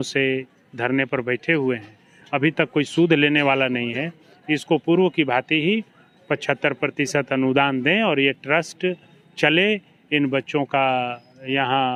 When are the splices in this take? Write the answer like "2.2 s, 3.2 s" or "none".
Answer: none